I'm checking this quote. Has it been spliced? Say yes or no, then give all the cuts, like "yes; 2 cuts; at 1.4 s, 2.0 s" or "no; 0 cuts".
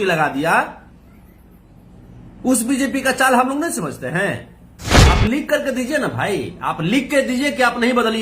yes; 1 cut; at 4.9 s